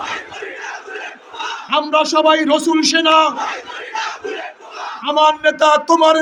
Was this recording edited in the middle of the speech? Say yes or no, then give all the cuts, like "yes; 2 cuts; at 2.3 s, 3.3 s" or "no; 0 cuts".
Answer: no; 0 cuts